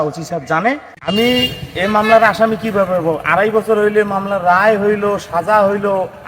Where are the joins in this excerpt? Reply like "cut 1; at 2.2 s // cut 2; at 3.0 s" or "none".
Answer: cut 1; at 1.0 s

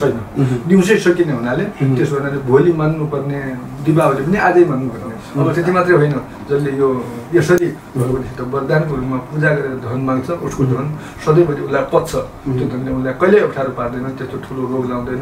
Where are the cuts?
cut 1; at 5.5 s

